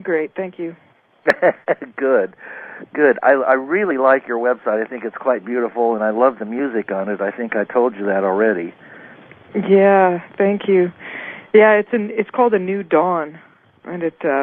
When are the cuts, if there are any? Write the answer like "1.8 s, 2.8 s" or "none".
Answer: none